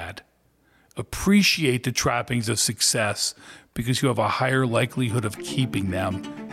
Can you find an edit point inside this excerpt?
no; 0 cuts

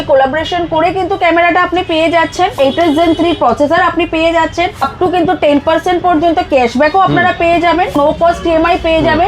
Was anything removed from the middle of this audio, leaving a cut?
yes; 3 cuts; at 2.5 s, 4.9 s, 8.0 s

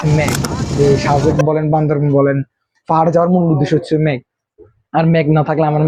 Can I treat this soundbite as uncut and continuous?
yes; 0 cuts

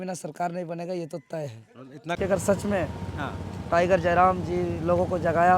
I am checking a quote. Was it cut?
yes; 1 cut; at 2.2 s

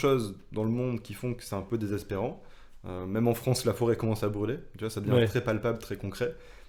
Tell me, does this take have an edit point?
no; 0 cuts

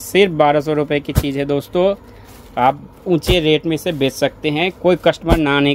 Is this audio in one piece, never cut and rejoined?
yes; 0 cuts

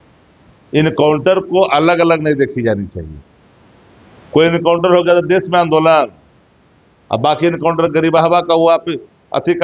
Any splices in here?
no; 0 cuts

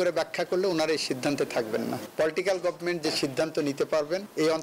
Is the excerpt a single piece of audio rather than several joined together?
yes; 0 cuts

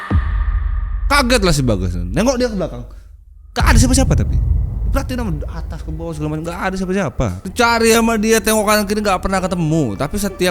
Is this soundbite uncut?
no; 1 cut; at 7.4 s

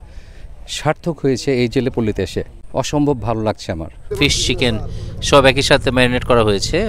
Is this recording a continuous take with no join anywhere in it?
no; 2 cuts; at 2.6 s, 4.0 s

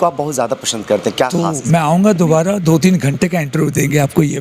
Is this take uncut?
no; 1 cut; at 1.4 s

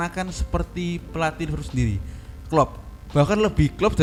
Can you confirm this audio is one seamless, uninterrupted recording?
yes; 0 cuts

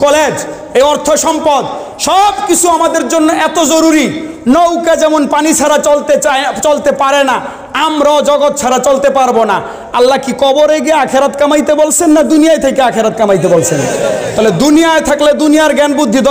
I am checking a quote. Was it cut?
no; 0 cuts

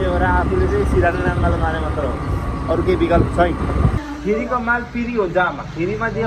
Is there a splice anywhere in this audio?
yes; 1 cut; at 4.0 s

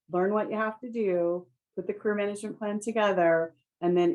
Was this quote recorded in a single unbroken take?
yes; 0 cuts

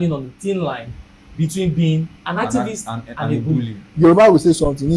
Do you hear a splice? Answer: yes; 2 cuts; at 2.2 s, 3.8 s

